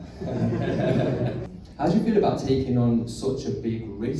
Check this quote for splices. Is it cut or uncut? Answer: cut